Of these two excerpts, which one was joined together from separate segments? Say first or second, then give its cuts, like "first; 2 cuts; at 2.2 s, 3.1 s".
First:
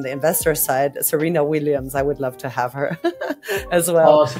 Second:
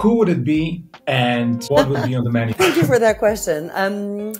second; 2 cuts; at 1.6 s, 2.5 s